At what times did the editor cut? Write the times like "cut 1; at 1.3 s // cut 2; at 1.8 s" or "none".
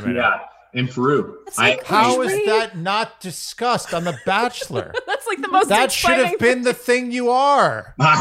cut 1; at 1.4 s